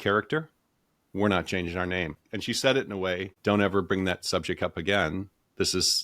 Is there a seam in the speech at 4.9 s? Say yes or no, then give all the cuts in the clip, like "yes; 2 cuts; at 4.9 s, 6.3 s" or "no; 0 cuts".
no; 2 cuts; at 2.3 s, 3.3 s